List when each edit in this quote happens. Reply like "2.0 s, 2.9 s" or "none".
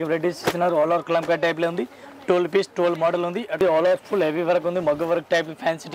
3.6 s